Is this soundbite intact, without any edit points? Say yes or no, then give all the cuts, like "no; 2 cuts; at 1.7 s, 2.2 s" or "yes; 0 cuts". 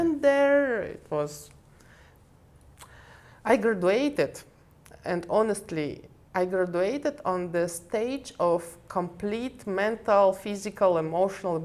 yes; 0 cuts